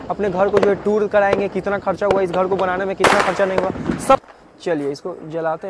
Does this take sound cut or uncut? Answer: cut